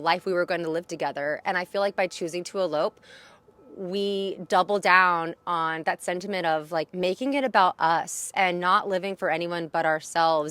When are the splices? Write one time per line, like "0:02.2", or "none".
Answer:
0:06.9